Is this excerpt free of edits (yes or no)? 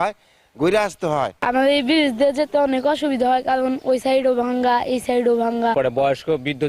no